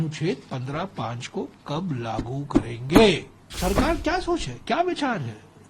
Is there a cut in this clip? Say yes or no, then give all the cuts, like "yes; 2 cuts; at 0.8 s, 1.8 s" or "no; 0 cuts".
yes; 1 cut; at 3.5 s